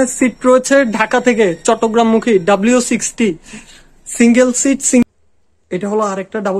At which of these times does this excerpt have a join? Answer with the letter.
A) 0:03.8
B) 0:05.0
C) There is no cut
B